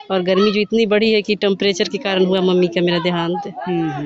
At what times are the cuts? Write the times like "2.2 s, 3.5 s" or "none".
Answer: none